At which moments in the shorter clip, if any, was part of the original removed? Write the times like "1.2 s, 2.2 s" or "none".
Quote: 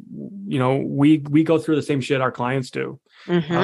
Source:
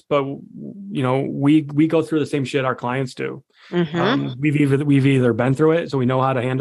none